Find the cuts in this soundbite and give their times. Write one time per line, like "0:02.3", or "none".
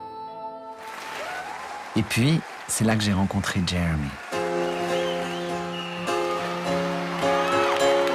0:05.1